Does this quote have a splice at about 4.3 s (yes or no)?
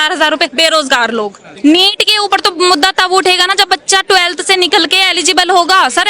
no